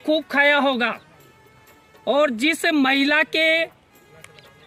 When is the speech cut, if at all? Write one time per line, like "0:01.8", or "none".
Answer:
none